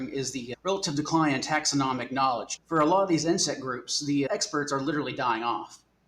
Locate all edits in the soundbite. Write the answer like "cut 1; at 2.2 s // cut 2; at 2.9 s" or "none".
cut 1; at 2.5 s // cut 2; at 4.3 s